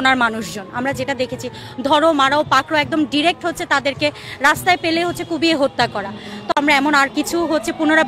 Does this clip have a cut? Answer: no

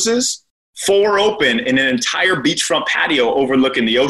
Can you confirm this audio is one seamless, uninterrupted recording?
yes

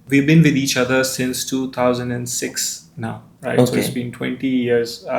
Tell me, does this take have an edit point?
no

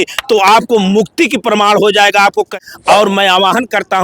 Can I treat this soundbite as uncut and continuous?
no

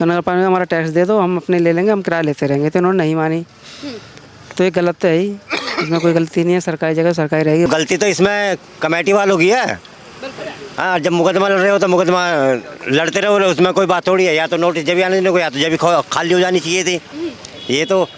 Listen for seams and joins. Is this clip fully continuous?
no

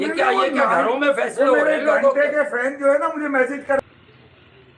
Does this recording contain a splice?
no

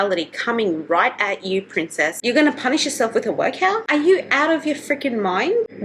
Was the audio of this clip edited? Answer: yes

